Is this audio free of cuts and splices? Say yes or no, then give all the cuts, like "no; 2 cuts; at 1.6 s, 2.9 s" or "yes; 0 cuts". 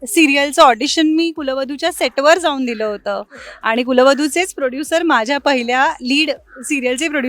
yes; 0 cuts